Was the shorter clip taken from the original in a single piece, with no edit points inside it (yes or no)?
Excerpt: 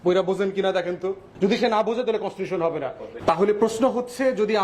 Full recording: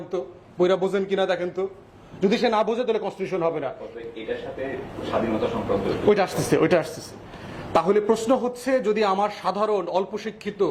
no